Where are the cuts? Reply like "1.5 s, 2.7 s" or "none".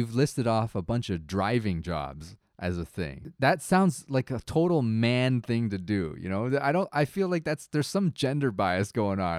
3.0 s